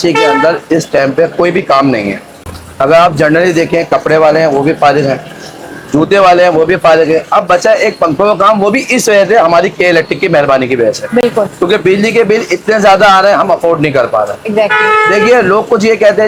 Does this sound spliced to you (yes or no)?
no